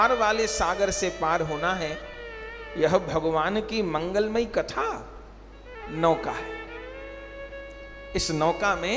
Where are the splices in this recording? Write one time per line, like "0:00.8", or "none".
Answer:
none